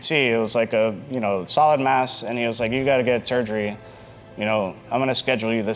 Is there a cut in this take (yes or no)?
no